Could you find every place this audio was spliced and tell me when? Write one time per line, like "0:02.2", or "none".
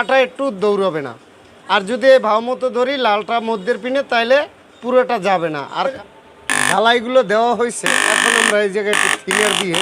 0:06.0